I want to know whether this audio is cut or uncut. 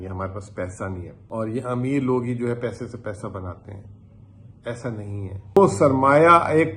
cut